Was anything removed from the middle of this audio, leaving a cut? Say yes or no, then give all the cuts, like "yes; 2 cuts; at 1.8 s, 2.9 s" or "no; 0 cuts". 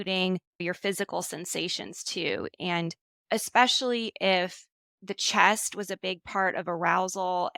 no; 0 cuts